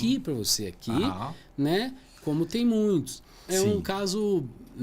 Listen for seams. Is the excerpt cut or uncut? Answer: cut